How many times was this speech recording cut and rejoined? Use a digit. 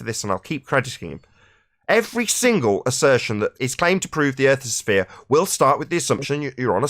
1